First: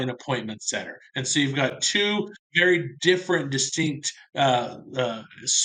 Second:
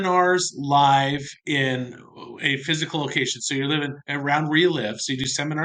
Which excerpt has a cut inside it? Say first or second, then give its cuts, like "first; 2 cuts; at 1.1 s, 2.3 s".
second; 1 cut; at 1.3 s